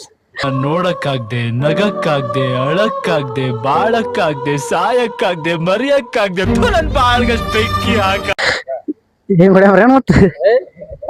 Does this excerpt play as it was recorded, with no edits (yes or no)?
yes